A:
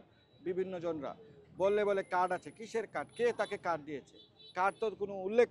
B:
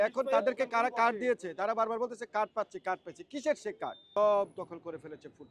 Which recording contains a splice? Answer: B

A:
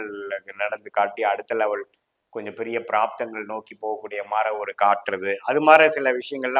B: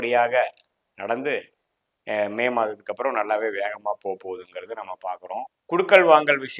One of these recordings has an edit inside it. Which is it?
B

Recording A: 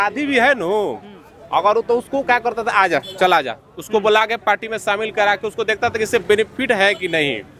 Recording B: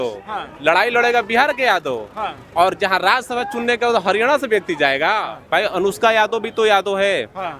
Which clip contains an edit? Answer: B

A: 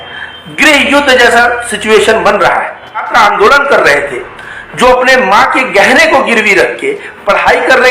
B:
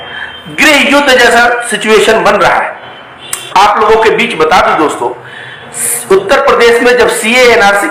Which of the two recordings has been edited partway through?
A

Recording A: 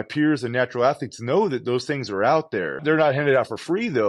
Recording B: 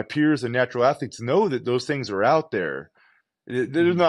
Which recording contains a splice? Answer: A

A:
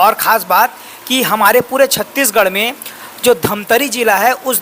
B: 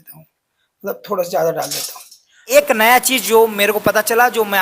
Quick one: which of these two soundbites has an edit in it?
B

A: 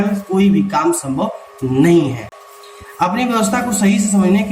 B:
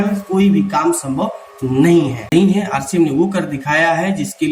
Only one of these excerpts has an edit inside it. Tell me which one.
B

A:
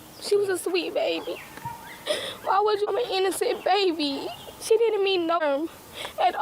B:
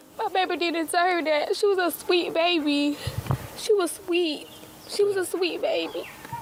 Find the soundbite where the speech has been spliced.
A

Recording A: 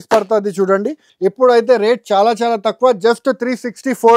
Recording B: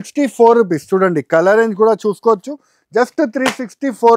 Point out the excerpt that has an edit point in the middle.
A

